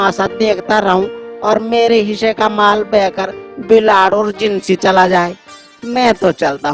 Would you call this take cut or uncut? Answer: uncut